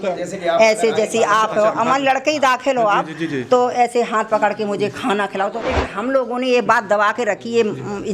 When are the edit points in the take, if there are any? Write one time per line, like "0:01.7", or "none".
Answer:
0:05.6

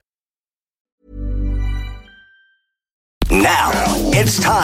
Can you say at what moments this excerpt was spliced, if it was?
0:03.1

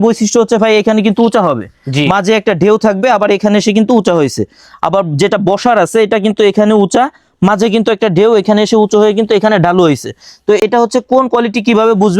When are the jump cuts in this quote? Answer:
none

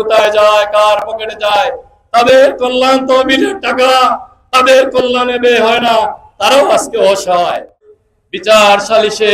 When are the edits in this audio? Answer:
0:07.9

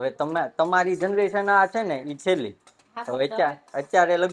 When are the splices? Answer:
none

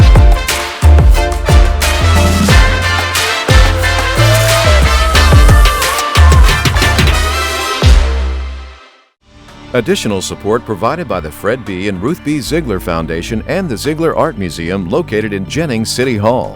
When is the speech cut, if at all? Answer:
0:09.4

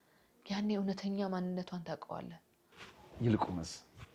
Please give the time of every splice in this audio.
none

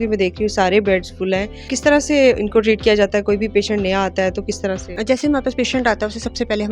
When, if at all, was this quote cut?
0:01.7
0:04.9

